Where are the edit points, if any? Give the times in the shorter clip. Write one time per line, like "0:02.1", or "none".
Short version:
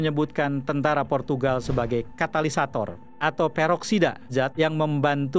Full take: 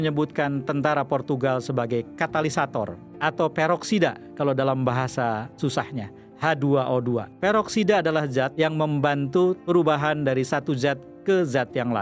0:04.3